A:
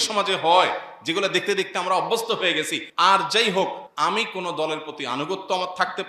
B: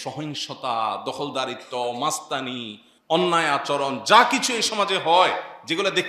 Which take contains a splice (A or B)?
A